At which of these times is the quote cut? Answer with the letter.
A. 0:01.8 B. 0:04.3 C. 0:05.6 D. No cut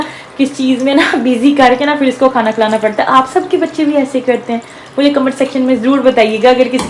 D